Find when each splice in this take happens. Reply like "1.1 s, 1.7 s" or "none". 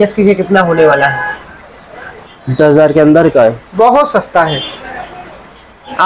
none